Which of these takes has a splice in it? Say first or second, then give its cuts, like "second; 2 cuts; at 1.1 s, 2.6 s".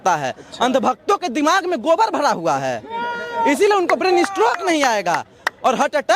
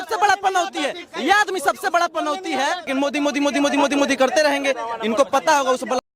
second; 1 cut; at 2.9 s